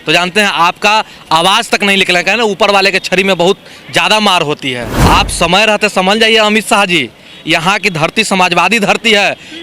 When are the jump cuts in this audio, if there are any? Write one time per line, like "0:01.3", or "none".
0:04.9